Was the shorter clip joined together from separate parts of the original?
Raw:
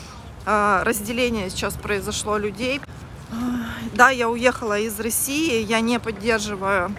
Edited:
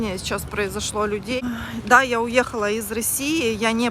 yes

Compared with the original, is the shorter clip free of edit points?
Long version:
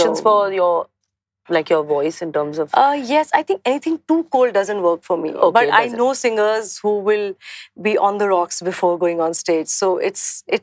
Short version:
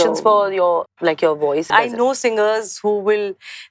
no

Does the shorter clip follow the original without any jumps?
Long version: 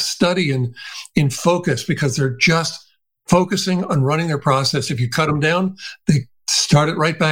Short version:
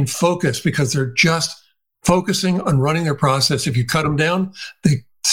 yes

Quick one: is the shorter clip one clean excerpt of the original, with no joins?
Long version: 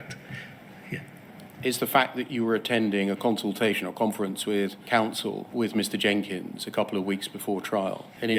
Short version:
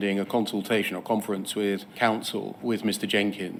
yes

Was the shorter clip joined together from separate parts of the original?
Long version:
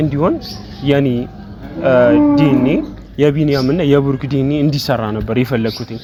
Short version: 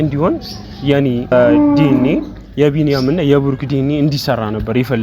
yes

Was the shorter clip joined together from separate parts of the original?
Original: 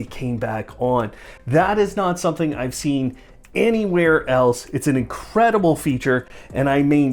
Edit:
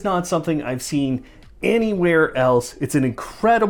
no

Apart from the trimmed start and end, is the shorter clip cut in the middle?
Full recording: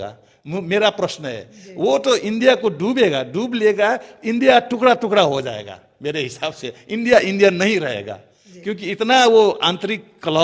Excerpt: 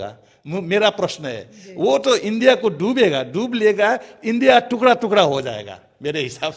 no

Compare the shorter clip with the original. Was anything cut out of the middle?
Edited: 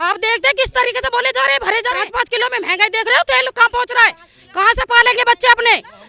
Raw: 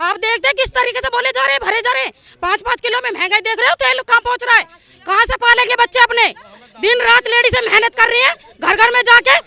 yes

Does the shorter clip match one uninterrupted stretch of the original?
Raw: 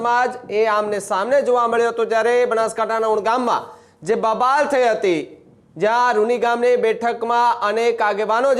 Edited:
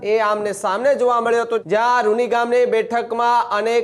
no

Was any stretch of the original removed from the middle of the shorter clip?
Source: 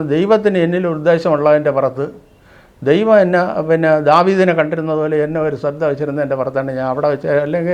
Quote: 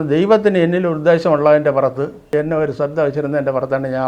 yes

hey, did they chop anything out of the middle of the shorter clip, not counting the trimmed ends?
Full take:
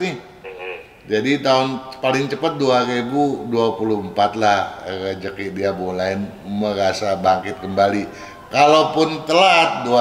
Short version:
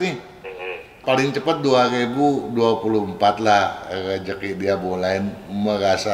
yes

